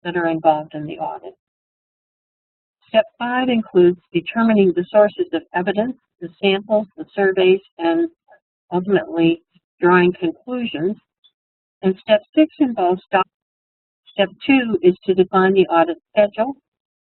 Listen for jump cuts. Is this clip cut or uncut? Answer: uncut